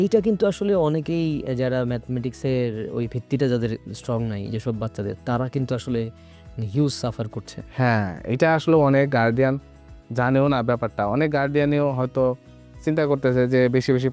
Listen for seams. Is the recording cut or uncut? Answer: uncut